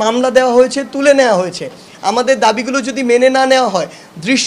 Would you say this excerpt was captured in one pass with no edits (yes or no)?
no